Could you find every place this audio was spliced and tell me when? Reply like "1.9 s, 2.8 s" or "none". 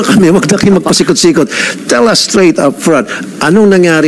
none